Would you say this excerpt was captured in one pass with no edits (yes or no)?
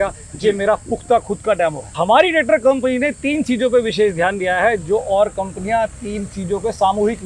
no